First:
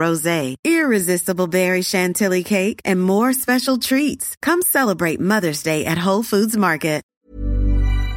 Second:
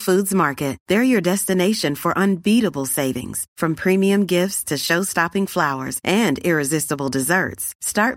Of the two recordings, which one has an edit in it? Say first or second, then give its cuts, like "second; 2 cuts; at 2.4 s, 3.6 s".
first; 1 cut; at 7.1 s